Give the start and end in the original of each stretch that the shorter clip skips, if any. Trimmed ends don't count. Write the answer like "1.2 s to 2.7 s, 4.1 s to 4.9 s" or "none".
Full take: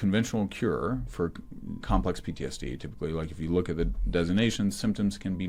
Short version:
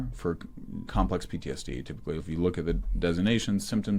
3.1 s to 3.3 s